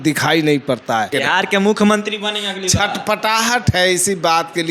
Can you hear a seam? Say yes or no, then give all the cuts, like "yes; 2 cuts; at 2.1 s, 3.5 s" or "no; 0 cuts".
yes; 1 cut; at 1.1 s